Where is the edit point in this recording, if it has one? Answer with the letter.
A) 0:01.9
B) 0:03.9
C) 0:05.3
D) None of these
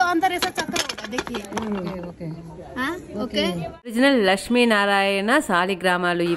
B